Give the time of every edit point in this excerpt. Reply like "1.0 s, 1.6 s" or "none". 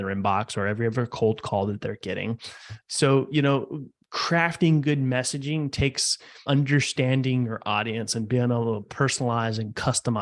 2.7 s, 6.4 s